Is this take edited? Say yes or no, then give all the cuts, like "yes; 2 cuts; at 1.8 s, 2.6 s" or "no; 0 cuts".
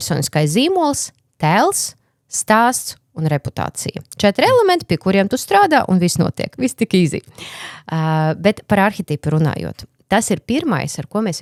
no; 0 cuts